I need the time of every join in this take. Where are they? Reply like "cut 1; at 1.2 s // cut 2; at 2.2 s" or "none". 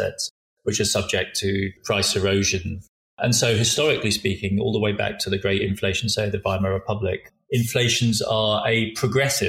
cut 1; at 1.8 s // cut 2; at 3.2 s // cut 3; at 7.3 s